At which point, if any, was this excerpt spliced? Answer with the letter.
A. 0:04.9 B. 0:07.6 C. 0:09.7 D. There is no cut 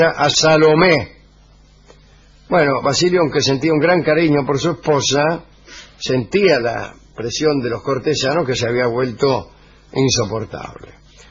B